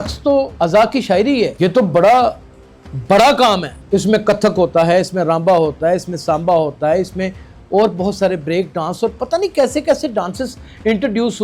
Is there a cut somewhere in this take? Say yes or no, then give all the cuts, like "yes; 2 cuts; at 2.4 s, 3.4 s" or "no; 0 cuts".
no; 0 cuts